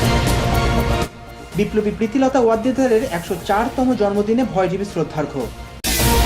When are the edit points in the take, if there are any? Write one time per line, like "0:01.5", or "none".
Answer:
none